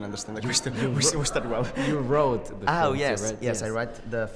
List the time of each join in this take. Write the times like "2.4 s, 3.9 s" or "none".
3.2 s